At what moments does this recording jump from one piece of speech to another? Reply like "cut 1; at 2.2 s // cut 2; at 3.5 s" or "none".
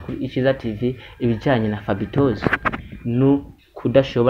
cut 1; at 2.9 s